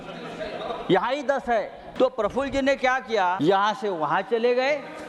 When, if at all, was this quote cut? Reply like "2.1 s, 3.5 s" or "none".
1.8 s, 3.4 s